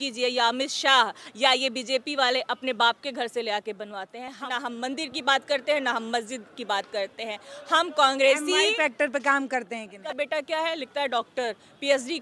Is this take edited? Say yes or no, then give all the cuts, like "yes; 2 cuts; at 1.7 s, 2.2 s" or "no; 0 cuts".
yes; 2 cuts; at 4.4 s, 10.0 s